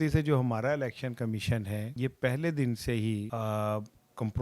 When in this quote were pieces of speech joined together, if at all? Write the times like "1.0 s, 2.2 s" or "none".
1.9 s, 3.3 s